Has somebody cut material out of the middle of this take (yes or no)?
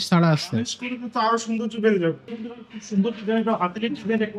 yes